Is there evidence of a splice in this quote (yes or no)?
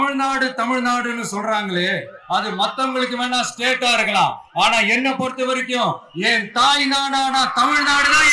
no